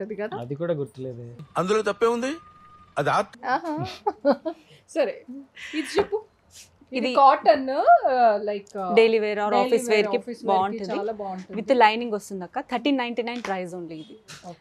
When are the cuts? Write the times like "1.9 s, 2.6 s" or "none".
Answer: none